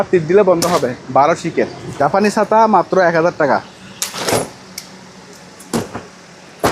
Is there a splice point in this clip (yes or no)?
yes